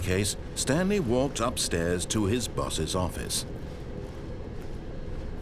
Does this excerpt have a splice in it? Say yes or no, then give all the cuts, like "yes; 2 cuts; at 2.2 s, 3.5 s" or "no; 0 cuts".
no; 0 cuts